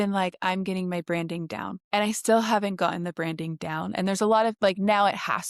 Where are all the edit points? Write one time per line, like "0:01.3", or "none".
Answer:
0:01.8